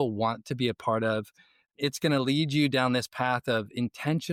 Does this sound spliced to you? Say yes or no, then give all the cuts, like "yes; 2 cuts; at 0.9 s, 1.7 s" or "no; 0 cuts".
no; 0 cuts